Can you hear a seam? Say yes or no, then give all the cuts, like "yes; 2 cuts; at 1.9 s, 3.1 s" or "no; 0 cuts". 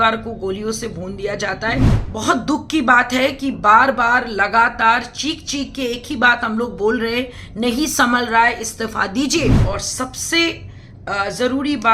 yes; 2 cuts; at 2.0 s, 9.6 s